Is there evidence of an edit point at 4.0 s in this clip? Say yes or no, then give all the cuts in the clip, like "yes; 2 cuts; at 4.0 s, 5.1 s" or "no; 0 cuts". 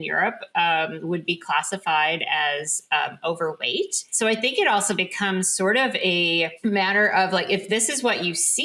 yes; 2 cuts; at 4.0 s, 6.5 s